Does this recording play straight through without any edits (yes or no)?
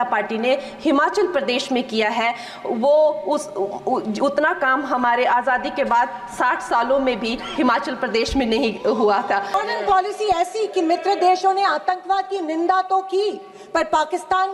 no